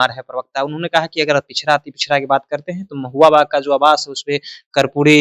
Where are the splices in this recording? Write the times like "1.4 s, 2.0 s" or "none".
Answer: none